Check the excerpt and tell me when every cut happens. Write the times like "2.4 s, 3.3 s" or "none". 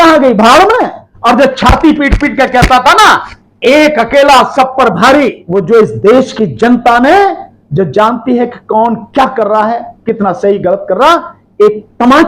1.0 s, 5.4 s